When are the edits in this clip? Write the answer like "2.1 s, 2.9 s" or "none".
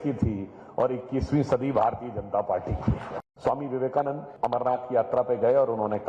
3.2 s, 4.3 s